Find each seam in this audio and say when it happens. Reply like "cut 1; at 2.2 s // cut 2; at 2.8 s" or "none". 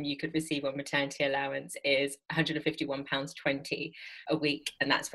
cut 1; at 2.2 s // cut 2; at 4.2 s